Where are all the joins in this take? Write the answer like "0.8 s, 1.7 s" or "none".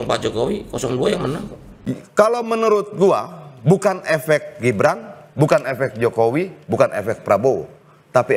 none